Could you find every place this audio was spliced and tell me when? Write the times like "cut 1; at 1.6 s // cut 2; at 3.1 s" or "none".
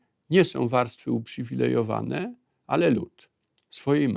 none